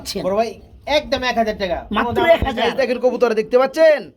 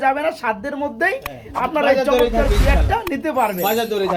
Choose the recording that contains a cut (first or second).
first